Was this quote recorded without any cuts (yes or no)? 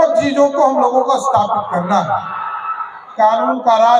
no